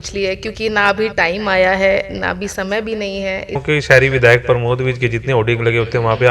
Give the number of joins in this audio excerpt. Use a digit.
1